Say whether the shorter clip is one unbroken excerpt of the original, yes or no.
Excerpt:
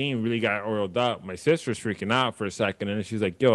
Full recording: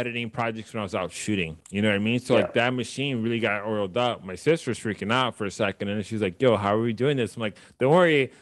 yes